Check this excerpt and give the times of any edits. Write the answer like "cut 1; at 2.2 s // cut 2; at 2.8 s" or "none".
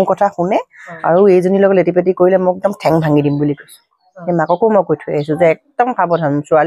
cut 1; at 4.1 s